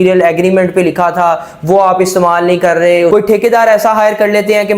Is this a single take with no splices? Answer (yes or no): no